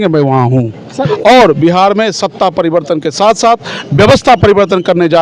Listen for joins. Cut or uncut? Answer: cut